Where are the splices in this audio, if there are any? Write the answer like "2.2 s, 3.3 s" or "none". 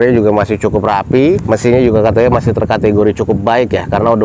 1.4 s

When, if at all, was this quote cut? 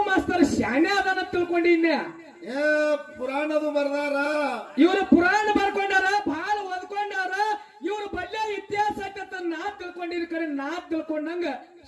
none

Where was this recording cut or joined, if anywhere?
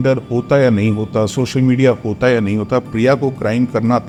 none

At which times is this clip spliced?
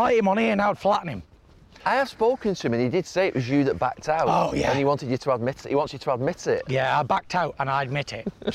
none

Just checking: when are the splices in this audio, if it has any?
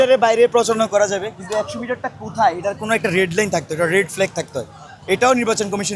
none

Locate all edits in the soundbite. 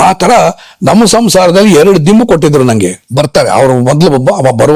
3.0 s

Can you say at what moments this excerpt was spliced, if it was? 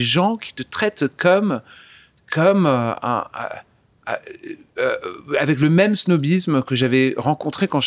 none

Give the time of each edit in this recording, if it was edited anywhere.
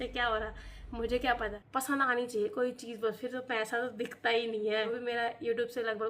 1.6 s, 4.9 s

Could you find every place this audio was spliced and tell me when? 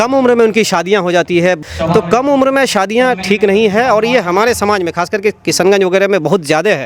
1.6 s

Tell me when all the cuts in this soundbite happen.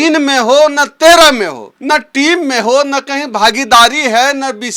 1.7 s

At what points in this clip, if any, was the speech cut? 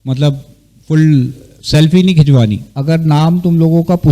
2.7 s

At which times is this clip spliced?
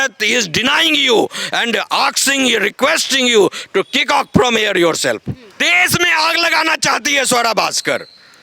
5.6 s

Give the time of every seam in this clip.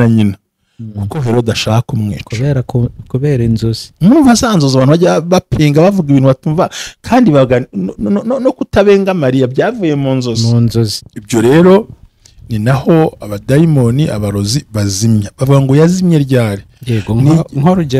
11.0 s

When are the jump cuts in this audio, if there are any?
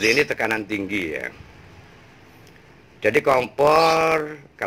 none

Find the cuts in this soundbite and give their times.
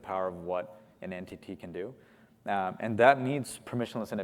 none

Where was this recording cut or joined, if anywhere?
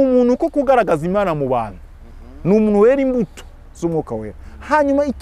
none

